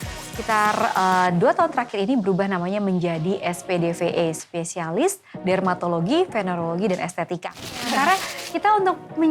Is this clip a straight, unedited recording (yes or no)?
no